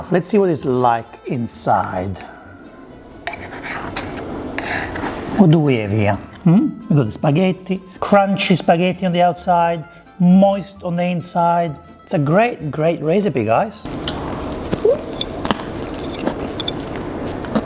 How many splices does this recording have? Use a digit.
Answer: 2